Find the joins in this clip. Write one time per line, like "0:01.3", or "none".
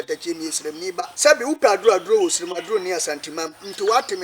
0:01.1